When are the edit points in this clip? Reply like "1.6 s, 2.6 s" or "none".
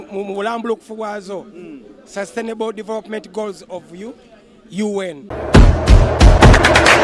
5.7 s